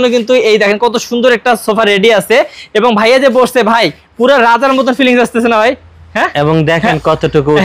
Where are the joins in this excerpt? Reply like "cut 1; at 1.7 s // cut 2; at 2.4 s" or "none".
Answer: none